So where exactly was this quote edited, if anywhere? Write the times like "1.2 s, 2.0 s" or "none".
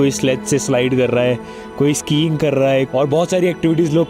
2.9 s